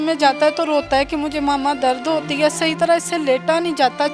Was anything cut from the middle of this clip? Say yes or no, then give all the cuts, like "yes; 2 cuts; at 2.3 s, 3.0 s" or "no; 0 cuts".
no; 0 cuts